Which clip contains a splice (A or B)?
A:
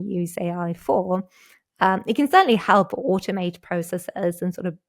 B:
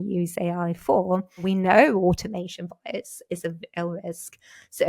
B